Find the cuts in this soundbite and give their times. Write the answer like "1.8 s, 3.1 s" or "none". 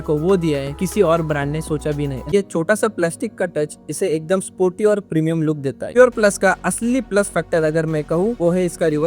2.3 s, 5.8 s